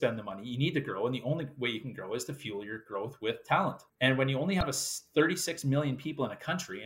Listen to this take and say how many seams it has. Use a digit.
1